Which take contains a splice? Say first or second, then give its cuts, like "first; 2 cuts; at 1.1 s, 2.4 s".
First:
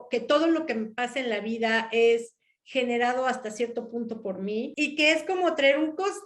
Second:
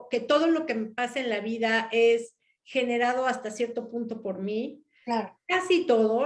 first; 1 cut; at 4.7 s